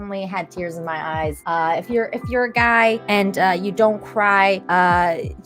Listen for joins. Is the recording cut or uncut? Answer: cut